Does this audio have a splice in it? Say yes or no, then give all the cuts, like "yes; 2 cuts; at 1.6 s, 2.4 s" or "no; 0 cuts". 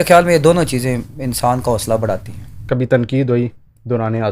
yes; 1 cut; at 2.6 s